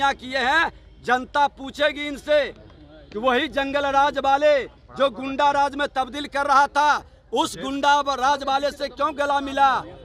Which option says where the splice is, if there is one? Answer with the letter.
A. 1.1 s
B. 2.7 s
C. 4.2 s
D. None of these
D